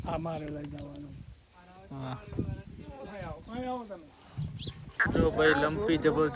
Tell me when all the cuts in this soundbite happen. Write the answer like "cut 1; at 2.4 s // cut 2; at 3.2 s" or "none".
cut 1; at 5.1 s